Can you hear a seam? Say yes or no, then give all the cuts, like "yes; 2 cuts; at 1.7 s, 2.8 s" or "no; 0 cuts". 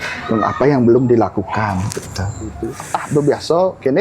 yes; 1 cut; at 2.6 s